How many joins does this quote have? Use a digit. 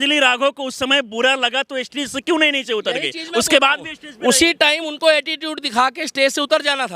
0